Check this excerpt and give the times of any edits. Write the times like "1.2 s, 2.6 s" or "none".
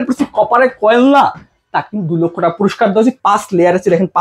3.2 s